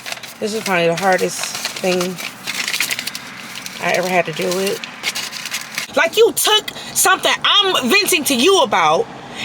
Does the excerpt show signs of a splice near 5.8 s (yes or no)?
yes